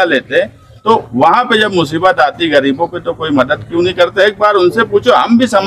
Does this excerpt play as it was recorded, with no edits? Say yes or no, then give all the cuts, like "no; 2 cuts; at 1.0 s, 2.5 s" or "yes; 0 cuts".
yes; 0 cuts